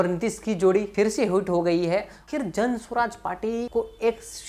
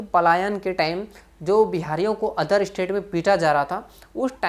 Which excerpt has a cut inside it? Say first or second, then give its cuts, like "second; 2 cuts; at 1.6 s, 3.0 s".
first; 1 cut; at 2.2 s